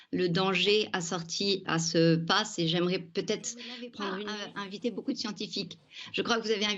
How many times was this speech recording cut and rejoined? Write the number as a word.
one